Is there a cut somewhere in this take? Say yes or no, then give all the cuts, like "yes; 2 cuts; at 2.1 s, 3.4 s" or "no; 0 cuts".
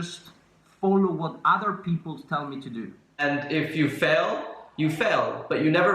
yes; 1 cut; at 3.2 s